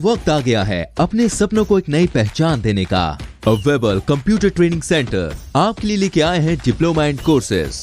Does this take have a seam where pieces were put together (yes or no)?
no